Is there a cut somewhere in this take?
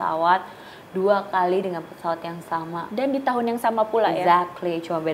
no; 0 cuts

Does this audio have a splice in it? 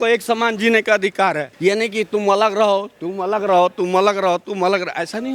no; 0 cuts

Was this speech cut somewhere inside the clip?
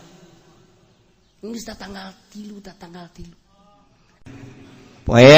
yes; 1 cut; at 4.3 s

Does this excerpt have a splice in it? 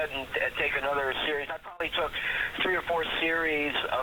yes; 1 cut; at 1.8 s

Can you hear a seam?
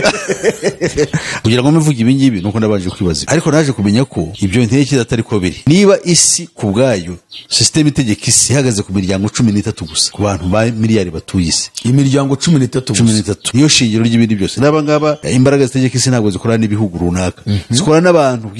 yes; 2 cuts; at 1.3 s, 15.2 s

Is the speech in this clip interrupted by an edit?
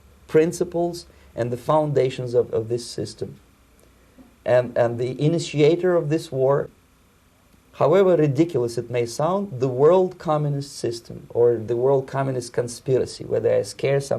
yes; 1 cut; at 6.8 s

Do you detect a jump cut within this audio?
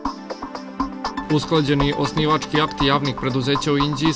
yes; 1 cut; at 0.9 s

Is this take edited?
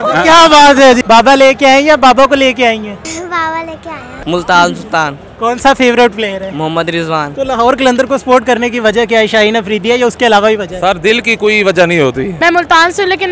yes; 4 cuts; at 1.0 s, 4.1 s, 7.3 s, 12.3 s

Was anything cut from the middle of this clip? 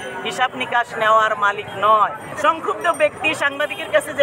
yes; 1 cut; at 2.3 s

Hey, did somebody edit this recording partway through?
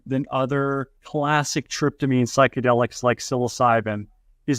yes; 1 cut; at 1.0 s

